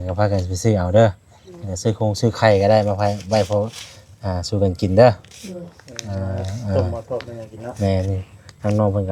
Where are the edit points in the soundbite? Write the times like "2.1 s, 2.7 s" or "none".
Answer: none